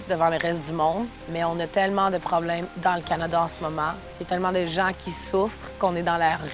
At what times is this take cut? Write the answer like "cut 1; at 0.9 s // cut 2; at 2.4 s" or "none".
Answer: cut 1; at 1.2 s // cut 2; at 2.7 s // cut 3; at 4.1 s